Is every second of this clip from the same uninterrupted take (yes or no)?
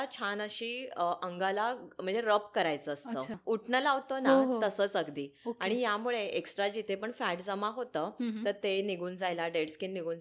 no